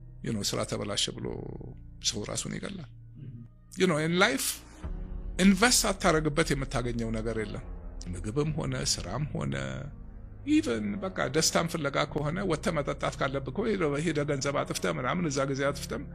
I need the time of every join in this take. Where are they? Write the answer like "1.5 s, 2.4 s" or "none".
none